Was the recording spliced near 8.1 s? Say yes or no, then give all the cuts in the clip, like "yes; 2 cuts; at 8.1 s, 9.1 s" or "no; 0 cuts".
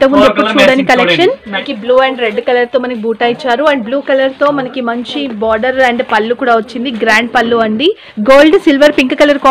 yes; 2 cuts; at 1.7 s, 8.1 s